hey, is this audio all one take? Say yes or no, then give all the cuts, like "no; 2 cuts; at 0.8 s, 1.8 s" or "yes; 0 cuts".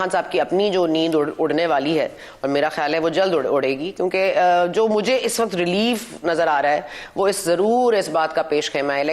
yes; 0 cuts